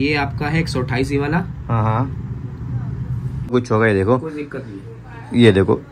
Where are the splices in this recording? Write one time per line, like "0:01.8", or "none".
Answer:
0:03.5